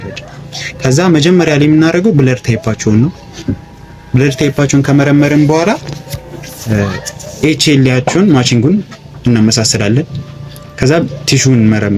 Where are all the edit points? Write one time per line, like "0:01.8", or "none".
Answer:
none